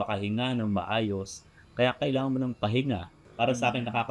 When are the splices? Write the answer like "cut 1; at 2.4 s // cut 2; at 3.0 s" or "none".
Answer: cut 1; at 3.2 s